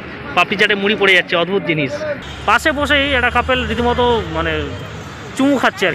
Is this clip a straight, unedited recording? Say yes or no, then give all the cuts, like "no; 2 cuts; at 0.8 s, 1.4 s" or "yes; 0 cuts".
no; 1 cut; at 2.2 s